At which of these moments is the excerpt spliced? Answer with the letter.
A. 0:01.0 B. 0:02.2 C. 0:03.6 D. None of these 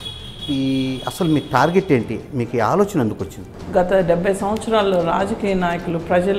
C